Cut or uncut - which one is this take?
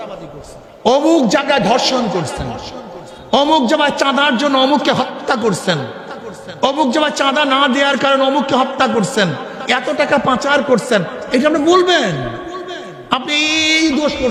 uncut